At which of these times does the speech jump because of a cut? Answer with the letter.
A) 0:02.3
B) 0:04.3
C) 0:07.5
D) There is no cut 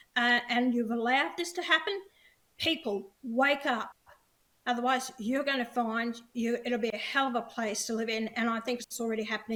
D